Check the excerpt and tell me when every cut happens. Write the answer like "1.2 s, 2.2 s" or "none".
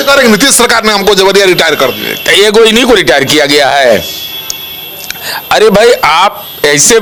none